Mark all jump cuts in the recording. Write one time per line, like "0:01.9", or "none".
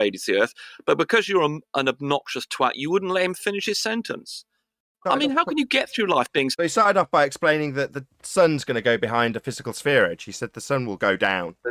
none